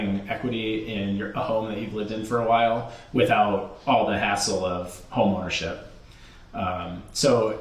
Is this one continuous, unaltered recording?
yes; 0 cuts

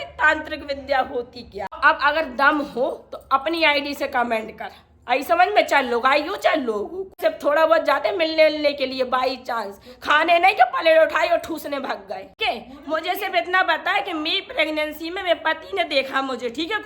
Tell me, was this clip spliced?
yes; 3 cuts; at 1.8 s, 7.1 s, 12.3 s

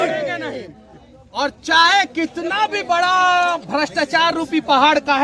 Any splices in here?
no; 0 cuts

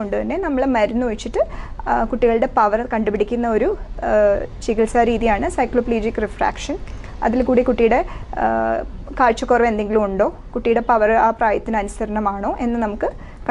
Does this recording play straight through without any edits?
yes; 0 cuts

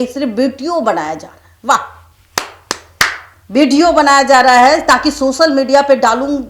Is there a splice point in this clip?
no; 0 cuts

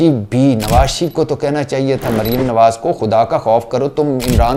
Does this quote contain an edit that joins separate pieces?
no; 0 cuts

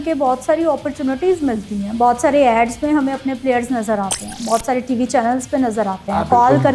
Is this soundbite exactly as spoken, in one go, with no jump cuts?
yes; 0 cuts

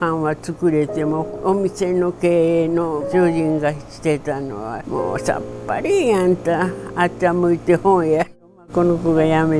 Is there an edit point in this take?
yes; 1 cut; at 8.7 s

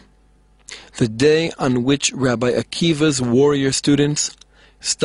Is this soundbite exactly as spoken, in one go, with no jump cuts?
yes; 0 cuts

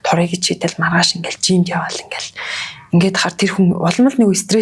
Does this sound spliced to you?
no; 0 cuts

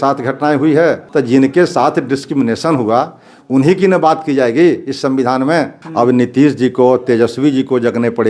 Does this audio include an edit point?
yes; 2 cuts; at 1.0 s, 5.8 s

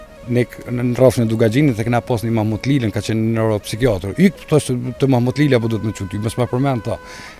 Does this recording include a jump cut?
no; 0 cuts

